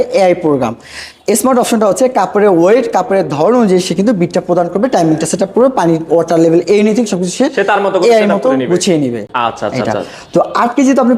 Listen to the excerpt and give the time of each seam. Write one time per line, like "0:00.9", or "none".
none

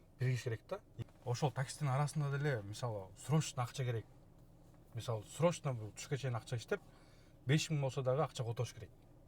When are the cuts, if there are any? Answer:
0:00.9

